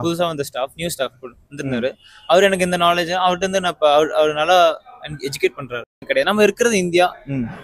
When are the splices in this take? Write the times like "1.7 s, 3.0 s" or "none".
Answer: 6.0 s

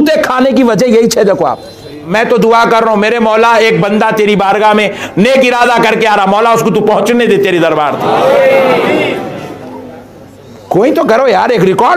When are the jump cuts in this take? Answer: 2.1 s

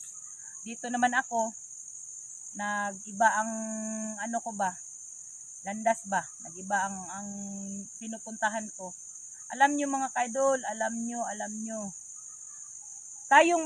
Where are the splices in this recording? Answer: none

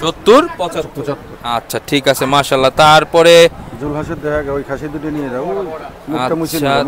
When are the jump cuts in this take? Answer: none

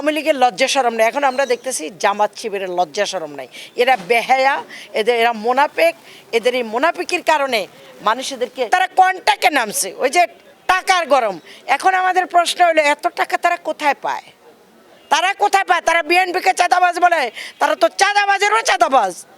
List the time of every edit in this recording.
8.7 s

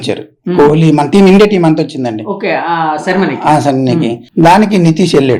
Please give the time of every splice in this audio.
4.2 s

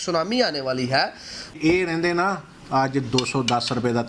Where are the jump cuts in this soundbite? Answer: 1.5 s

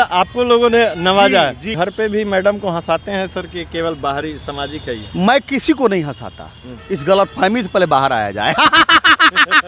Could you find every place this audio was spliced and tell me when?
1.6 s

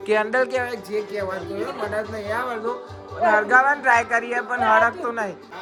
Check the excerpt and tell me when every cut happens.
none

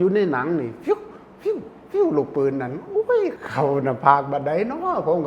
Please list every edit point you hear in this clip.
3.4 s

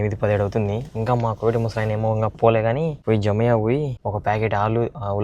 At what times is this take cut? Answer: 3.0 s, 4.0 s

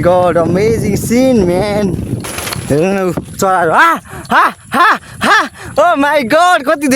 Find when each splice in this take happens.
2.2 s

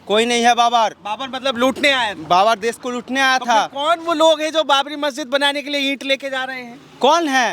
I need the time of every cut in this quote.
none

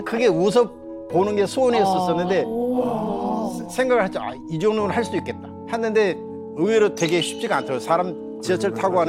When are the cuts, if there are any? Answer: none

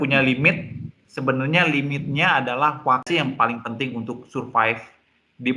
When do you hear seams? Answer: 3.1 s

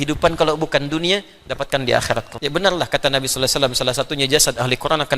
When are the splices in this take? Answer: 2.3 s

